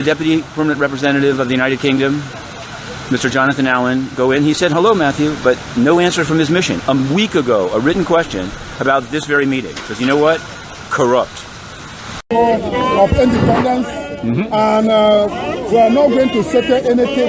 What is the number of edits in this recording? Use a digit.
1